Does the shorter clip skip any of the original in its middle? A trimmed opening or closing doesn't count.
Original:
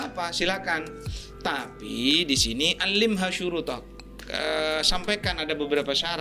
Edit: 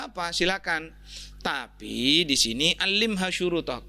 no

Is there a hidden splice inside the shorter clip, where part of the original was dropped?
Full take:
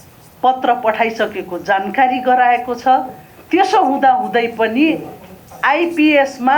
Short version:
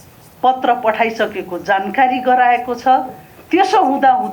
no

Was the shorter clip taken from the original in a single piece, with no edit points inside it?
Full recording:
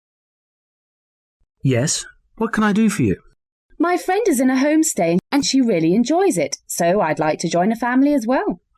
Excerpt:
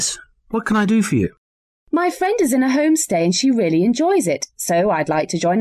no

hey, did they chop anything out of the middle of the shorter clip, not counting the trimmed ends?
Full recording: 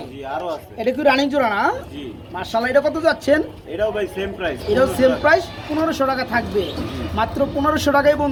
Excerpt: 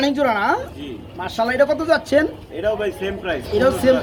no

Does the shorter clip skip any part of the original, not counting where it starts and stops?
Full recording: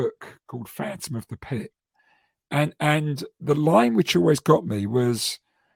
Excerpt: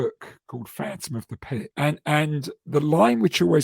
yes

